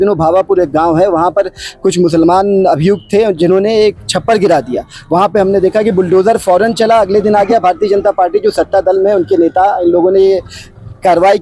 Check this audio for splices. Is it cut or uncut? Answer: uncut